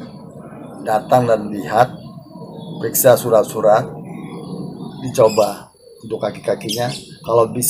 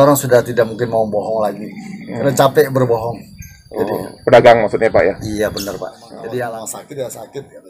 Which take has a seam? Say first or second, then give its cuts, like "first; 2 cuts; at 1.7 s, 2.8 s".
second; 1 cut; at 6.5 s